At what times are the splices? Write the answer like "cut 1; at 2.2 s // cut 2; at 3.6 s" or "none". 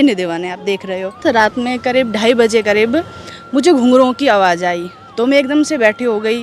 cut 1; at 1.2 s